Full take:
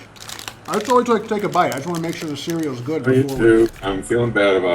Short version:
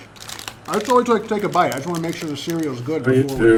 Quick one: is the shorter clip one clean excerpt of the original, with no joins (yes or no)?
yes